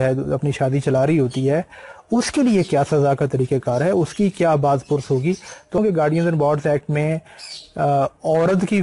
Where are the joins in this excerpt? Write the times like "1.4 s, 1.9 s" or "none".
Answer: 5.8 s